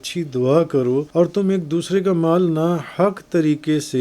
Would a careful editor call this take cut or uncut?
cut